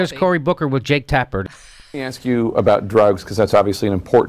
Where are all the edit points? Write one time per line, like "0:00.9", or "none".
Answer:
0:01.5